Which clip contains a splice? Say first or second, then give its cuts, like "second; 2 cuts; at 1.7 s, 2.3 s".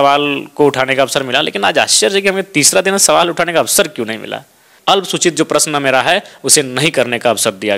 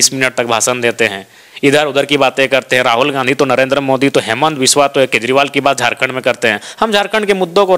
first; 1 cut; at 4.7 s